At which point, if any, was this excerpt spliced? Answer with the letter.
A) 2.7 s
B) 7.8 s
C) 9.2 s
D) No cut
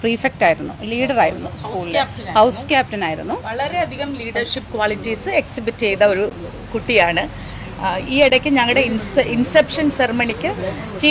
D